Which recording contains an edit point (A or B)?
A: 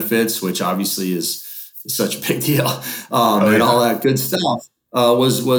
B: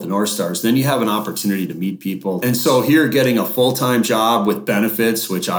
B